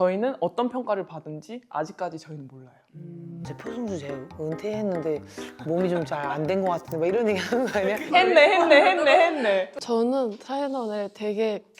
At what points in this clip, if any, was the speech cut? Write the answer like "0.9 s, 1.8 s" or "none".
3.4 s, 9.7 s